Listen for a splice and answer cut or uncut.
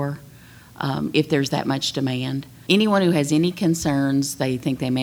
cut